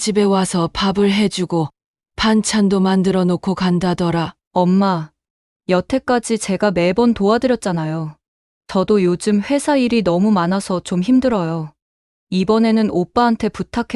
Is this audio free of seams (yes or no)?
no